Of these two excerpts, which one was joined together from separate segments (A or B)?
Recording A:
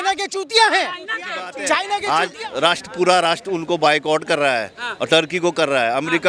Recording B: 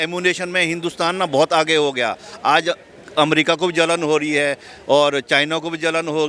A